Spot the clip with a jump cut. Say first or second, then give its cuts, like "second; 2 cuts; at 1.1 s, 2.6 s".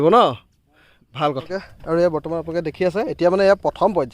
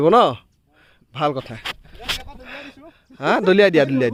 first; 1 cut; at 1.5 s